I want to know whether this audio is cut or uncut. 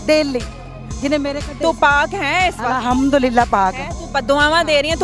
uncut